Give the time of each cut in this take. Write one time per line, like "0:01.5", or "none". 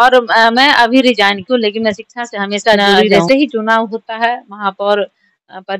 0:02.9